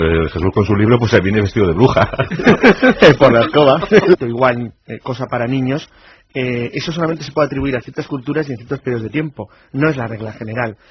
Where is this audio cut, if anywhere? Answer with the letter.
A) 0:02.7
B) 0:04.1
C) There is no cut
C